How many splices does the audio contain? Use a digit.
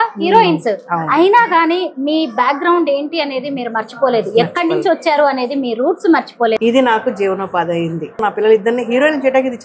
2